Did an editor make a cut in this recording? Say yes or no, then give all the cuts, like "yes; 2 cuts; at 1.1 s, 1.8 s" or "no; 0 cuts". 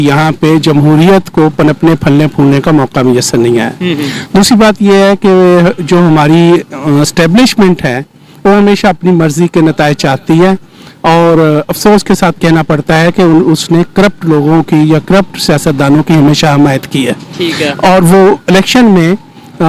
no; 0 cuts